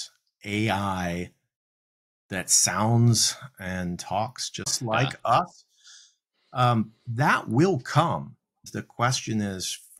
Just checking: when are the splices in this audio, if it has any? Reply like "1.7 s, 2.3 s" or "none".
4.8 s, 8.7 s